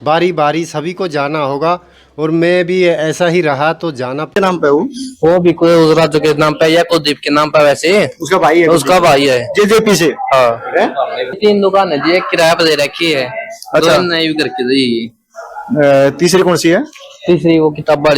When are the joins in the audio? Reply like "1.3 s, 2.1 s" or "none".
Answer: 4.4 s, 11.4 s